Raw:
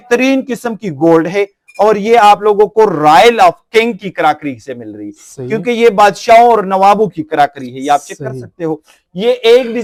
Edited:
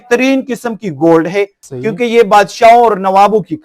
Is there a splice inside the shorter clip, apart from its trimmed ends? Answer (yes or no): yes